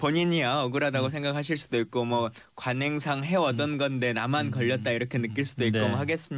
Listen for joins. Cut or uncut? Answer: cut